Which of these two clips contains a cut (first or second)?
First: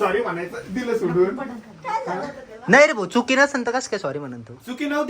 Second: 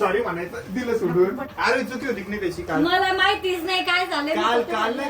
second